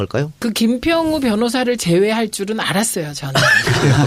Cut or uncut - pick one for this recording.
uncut